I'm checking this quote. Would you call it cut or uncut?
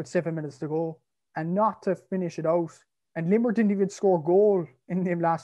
uncut